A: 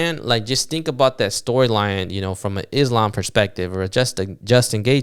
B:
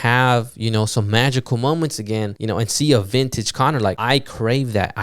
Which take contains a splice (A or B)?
B